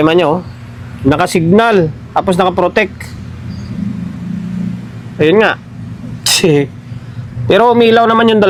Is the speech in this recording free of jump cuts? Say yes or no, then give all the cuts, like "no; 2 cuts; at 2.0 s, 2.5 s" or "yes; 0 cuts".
yes; 0 cuts